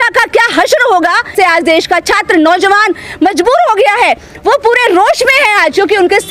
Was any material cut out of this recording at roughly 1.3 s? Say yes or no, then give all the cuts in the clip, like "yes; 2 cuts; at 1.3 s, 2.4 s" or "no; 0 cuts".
yes; 1 cut; at 1.3 s